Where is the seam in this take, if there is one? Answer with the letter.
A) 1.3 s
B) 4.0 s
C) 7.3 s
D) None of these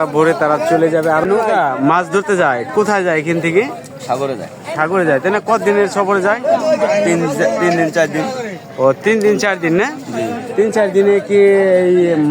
A